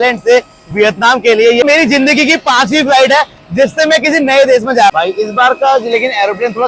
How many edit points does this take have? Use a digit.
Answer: 2